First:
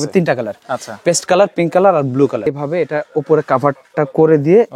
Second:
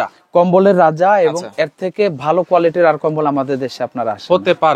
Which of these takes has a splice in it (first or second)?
first